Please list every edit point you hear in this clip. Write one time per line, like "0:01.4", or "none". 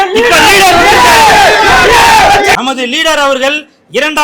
0:02.6